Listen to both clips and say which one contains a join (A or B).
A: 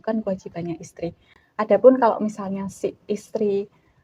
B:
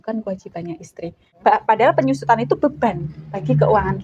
B